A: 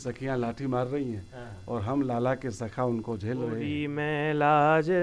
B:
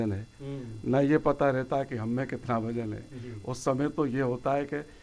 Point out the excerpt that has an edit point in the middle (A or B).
A